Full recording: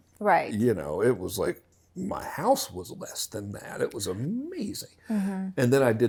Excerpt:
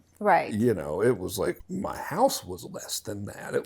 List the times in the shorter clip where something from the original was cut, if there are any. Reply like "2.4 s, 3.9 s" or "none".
1.7 s

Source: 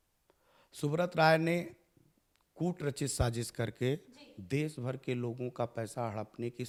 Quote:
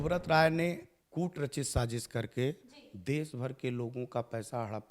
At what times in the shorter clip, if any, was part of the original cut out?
0.9 s

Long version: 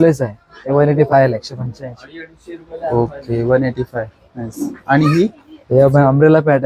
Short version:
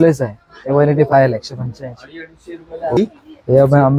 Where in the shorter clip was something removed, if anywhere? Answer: 3.0 s

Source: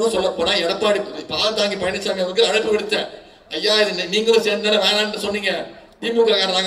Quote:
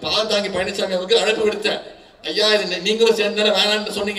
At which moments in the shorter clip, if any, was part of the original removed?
none

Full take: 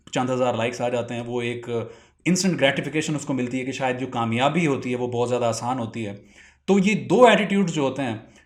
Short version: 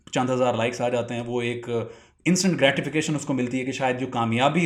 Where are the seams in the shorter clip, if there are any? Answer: none

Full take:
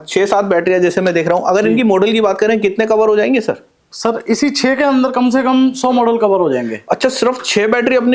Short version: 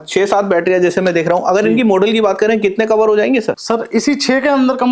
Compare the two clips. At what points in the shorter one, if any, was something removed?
3.6 s

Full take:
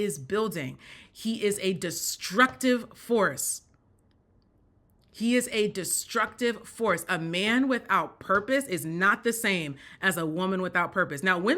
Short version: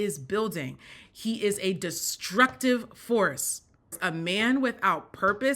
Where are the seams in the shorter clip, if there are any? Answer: 4.0 s

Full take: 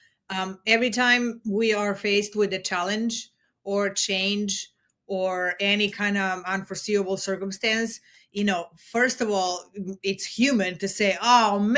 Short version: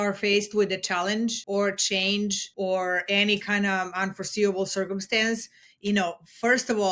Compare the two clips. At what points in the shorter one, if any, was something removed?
1.4 s, 2.4 s

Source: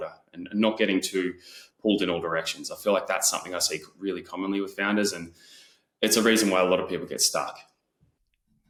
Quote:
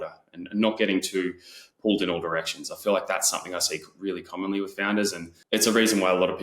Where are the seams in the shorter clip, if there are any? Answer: 5.3 s

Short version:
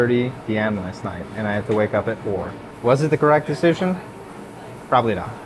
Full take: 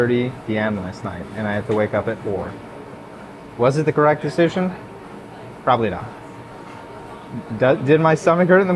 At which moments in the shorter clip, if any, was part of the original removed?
2.6 s

